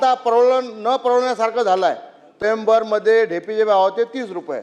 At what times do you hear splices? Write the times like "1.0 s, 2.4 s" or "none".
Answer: 2.4 s